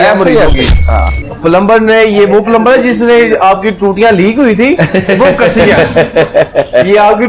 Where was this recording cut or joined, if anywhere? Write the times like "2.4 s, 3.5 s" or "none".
1.0 s